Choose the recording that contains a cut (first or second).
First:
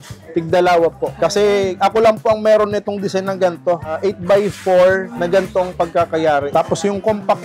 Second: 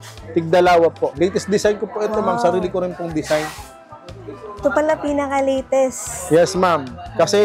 first